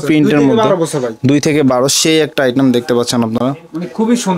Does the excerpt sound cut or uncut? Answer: uncut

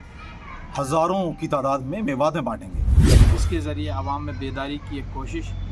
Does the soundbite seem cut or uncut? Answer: cut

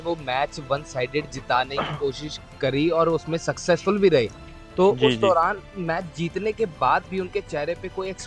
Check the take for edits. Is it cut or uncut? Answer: uncut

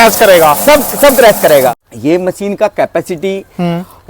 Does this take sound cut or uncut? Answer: cut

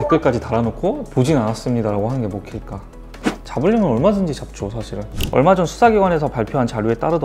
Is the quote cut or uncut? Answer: cut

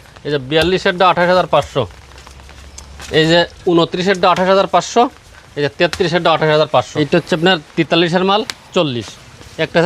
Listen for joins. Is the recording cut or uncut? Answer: cut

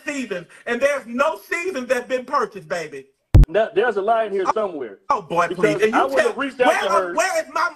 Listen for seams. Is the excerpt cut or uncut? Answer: cut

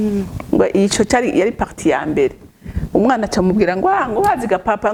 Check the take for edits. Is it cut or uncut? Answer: uncut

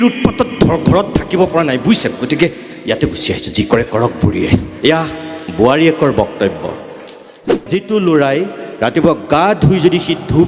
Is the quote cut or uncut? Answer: cut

